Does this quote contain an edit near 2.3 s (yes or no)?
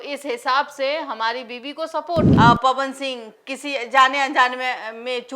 yes